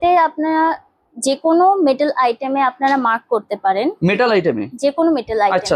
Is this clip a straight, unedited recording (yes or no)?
yes